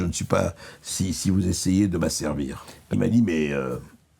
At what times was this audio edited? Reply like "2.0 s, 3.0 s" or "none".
2.9 s